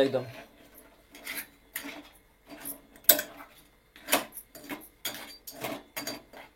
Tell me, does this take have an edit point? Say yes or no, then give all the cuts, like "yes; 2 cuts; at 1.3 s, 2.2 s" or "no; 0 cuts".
no; 0 cuts